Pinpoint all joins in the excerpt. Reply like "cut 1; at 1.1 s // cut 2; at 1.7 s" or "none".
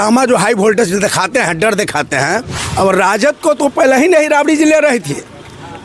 cut 1; at 2.6 s